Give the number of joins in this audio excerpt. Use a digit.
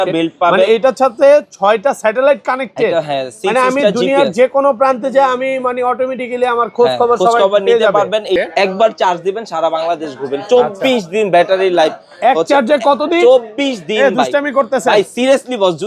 1